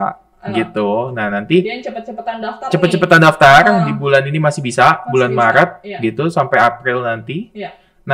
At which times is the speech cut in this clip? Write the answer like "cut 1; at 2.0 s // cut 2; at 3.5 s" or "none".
none